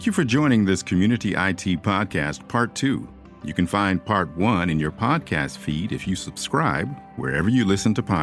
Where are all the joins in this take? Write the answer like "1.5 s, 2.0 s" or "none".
none